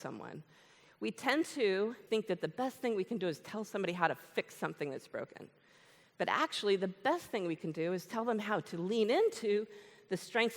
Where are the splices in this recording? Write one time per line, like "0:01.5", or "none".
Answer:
0:02.0

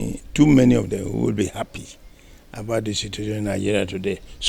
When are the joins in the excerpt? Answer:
none

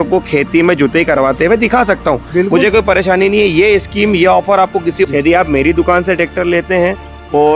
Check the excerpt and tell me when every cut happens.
0:05.1

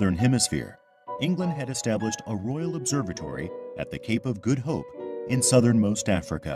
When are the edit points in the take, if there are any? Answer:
0:03.7

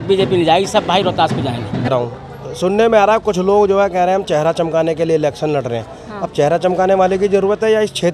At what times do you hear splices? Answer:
0:01.9

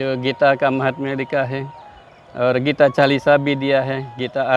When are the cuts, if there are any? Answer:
none

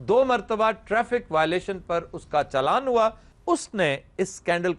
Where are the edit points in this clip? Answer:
0:03.3

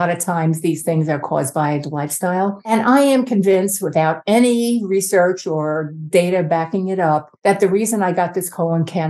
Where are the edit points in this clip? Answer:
0:02.7
0:07.3

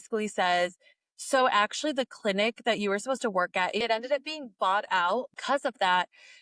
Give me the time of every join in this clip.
0:03.8
0:05.3

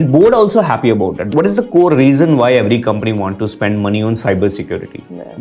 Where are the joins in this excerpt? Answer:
0:01.2

